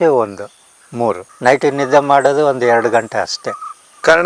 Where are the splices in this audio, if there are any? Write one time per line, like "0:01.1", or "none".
0:01.3